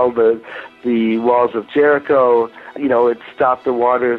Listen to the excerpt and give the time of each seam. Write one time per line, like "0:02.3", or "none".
0:02.7